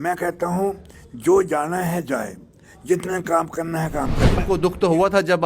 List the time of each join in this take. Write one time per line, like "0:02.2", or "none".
0:04.4